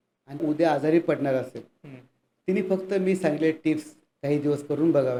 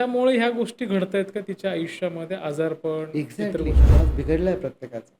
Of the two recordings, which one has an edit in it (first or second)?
second